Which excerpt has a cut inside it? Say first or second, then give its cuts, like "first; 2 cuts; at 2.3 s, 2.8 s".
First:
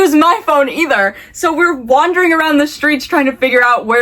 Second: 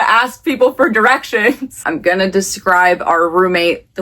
second; 1 cut; at 1.8 s